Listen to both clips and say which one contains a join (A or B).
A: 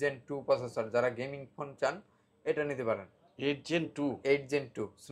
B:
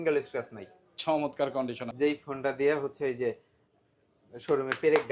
B